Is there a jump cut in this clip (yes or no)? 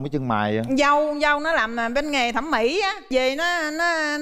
no